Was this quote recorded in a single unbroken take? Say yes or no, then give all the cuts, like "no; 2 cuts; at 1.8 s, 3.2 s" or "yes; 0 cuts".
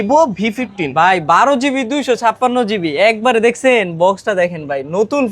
yes; 0 cuts